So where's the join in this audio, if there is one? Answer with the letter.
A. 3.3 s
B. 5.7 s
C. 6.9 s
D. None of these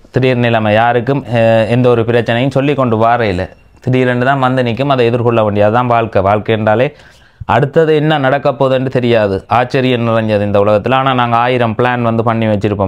D